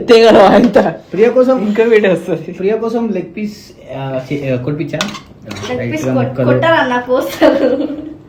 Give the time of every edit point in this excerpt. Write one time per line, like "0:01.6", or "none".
none

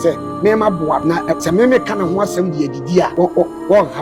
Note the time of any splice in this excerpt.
0:01.3
0:03.1

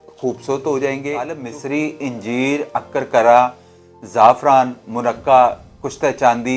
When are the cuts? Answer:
0:01.5

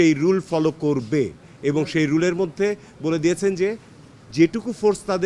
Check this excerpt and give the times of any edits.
none

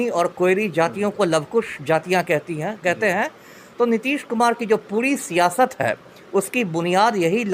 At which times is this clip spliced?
none

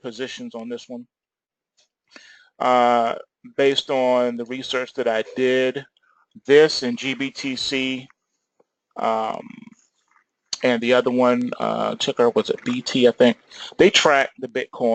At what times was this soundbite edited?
0:07.8

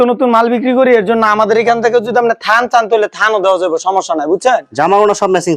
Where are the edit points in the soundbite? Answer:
none

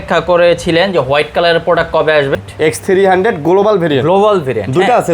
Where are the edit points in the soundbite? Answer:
0:02.3

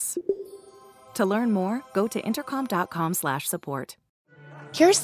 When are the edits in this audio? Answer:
0:04.0

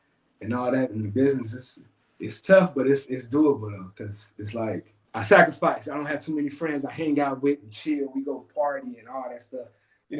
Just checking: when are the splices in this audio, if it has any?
0:05.0

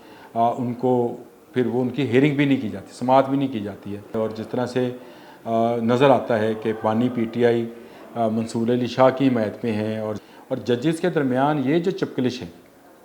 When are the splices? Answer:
0:04.1
0:10.2

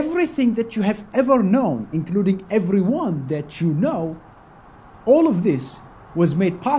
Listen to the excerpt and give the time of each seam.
none

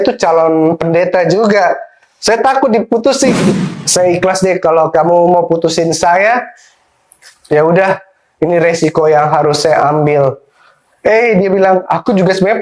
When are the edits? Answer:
0:03.3

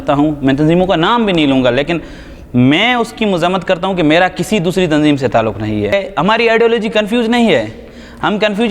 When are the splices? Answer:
0:05.9

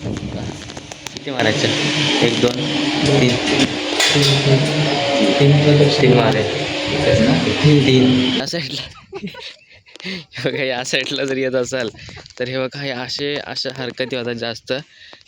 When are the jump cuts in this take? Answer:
0:08.4

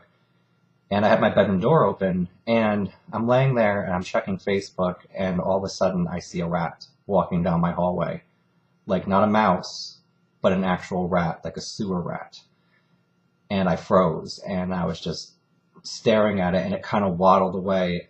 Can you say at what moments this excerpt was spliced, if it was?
0:16.3

